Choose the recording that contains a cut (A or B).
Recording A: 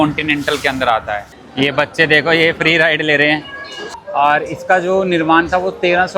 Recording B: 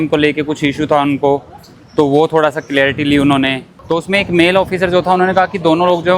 A